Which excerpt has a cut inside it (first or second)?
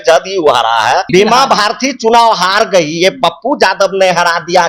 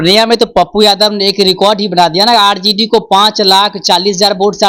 first